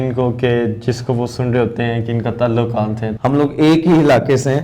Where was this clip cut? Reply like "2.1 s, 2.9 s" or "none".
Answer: 3.1 s